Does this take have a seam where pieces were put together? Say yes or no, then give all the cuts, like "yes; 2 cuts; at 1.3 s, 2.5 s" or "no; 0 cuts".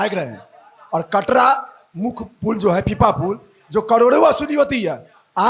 no; 0 cuts